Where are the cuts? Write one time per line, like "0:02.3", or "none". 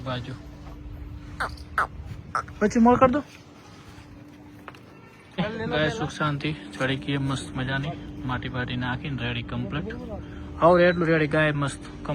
none